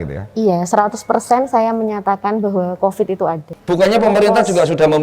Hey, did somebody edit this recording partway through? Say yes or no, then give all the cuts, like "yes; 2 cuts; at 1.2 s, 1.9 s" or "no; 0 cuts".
yes; 1 cut; at 3.5 s